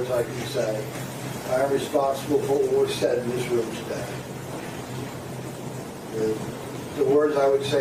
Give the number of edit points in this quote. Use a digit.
0